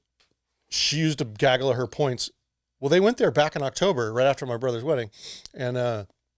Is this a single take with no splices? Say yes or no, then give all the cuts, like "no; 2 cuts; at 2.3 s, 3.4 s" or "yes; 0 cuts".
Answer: yes; 0 cuts